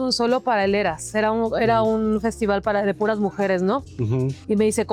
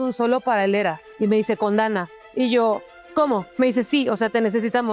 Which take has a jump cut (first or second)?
second